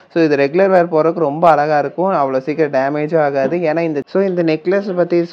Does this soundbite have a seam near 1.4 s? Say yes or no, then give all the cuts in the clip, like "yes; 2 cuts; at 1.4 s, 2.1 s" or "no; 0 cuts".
no; 1 cut; at 4.0 s